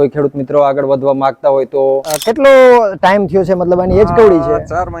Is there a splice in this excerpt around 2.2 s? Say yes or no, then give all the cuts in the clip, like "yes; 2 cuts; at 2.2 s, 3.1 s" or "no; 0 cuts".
yes; 1 cut; at 2.2 s